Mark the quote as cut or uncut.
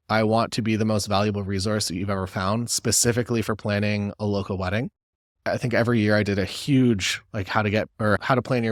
uncut